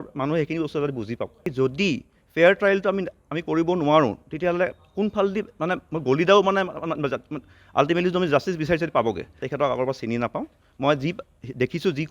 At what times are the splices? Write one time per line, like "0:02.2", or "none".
0:01.4
0:09.4